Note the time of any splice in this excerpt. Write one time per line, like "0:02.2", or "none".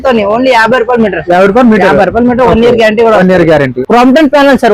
0:03.8